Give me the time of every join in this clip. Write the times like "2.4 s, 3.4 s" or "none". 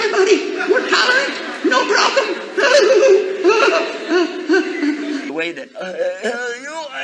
5.3 s

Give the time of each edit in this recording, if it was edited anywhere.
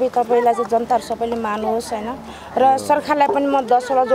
none

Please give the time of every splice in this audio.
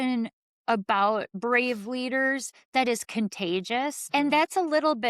1.3 s, 4.0 s

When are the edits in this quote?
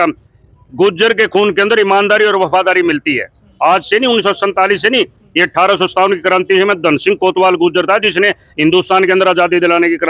none

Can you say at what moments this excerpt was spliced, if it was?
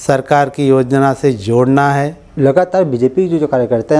2.2 s

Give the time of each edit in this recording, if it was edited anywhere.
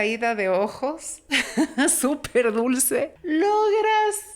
3.2 s

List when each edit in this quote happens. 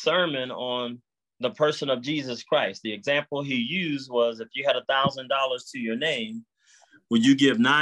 none

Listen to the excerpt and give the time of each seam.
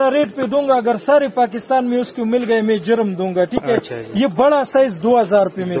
none

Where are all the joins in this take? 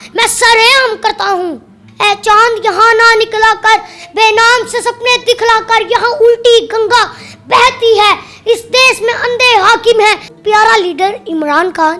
1.8 s, 10.3 s

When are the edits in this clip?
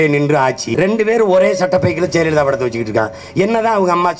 none

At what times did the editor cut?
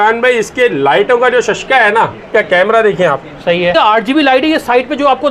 2.3 s, 3.7 s

